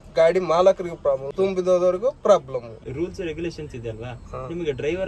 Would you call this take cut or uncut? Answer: cut